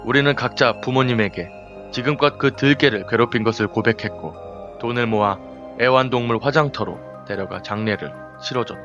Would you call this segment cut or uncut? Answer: cut